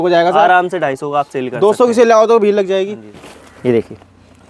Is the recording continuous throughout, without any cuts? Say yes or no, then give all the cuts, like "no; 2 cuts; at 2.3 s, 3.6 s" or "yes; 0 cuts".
no; 1 cut; at 3.0 s